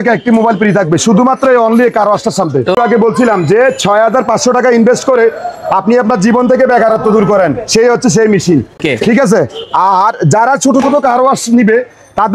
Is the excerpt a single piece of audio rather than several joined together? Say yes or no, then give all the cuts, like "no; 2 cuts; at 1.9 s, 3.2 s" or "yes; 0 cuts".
no; 2 cuts; at 2.7 s, 8.8 s